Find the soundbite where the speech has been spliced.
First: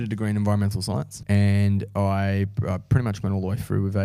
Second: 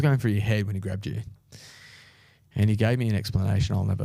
first; 1 cut; at 1.1 s

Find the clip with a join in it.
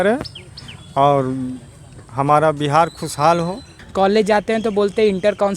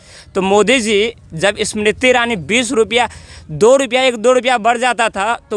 first; 1 cut; at 3.8 s

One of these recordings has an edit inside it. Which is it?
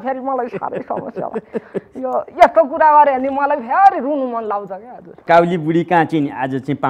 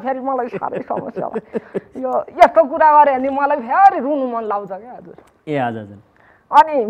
first; 1 cut; at 5.2 s

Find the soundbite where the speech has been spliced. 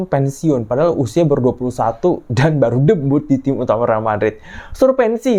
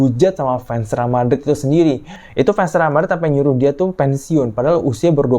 second; 1 cut; at 2.1 s

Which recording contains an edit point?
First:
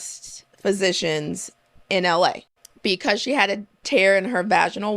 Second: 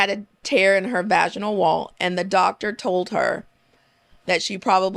first; 1 cut; at 2.5 s

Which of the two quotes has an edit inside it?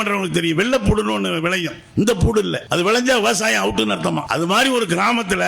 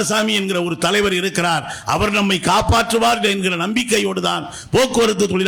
first; 2 cuts; at 2.6 s, 4.3 s

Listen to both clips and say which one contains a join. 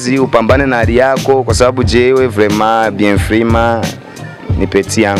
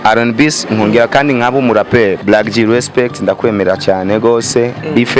second; 1 cut; at 2.2 s

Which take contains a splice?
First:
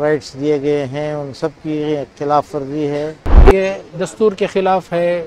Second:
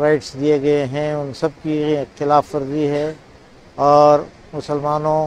first; 1 cut; at 3.4 s

